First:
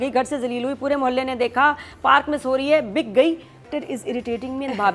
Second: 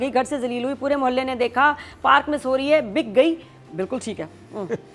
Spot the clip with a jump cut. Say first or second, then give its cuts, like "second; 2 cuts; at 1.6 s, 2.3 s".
first; 1 cut; at 3.7 s